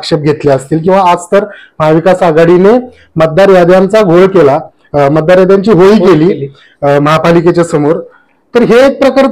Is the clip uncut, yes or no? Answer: yes